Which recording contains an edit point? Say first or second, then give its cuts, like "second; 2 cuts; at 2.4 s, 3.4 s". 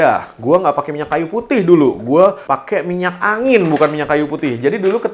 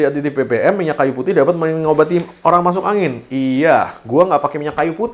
first; 1 cut; at 2.4 s